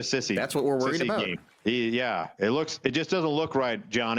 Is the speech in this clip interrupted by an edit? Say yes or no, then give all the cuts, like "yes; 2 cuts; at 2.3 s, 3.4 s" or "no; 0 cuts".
yes; 1 cut; at 1.5 s